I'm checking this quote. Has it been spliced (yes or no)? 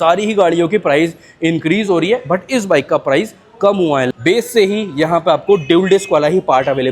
yes